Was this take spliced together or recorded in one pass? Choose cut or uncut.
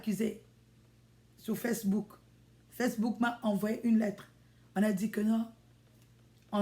uncut